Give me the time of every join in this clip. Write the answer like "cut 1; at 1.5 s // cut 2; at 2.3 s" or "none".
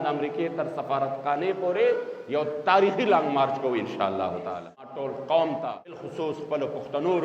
cut 1; at 4.9 s // cut 2; at 6.0 s

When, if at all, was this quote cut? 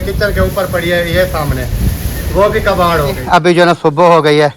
cut 1; at 3.1 s

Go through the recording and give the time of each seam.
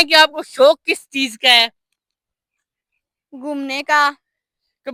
none

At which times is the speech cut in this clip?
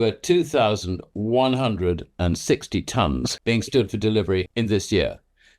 cut 1; at 3.3 s // cut 2; at 4.5 s

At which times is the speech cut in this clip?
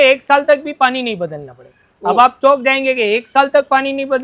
none

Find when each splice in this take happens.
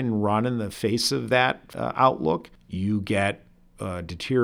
cut 1; at 1.7 s // cut 2; at 2.6 s

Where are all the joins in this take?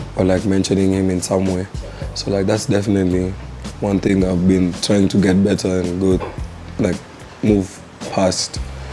none

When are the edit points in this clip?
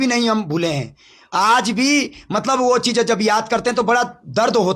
none

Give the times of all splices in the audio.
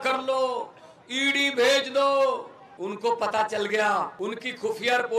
cut 1; at 2.6 s // cut 2; at 4.1 s

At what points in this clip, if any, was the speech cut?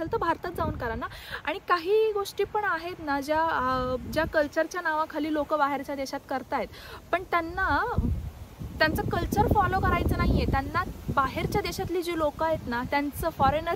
none

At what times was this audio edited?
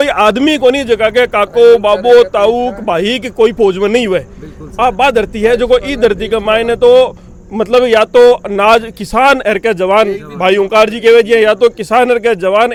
none

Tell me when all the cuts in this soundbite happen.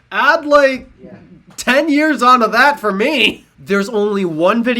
cut 1; at 3.5 s

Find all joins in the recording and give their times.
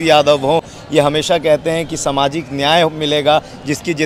none

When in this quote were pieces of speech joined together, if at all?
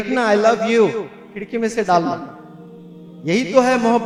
none

